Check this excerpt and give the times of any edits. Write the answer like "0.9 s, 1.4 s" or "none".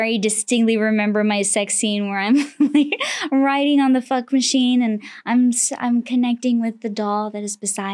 none